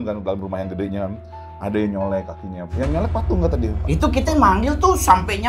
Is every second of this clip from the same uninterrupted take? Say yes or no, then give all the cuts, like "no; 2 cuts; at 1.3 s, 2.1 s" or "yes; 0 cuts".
no; 1 cut; at 3.8 s